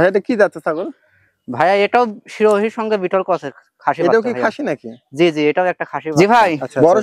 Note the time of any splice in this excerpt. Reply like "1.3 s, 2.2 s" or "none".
6.0 s